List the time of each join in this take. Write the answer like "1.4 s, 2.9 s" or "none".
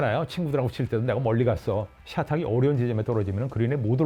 2.0 s